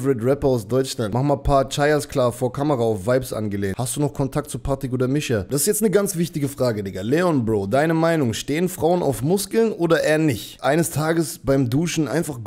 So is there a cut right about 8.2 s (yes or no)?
no